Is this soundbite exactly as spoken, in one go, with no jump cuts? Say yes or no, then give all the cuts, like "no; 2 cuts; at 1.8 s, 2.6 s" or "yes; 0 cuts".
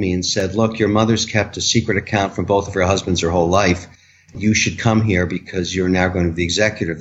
yes; 0 cuts